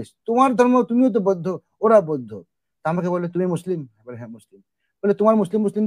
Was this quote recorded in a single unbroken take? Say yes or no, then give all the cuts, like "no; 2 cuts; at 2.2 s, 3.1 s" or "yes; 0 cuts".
yes; 0 cuts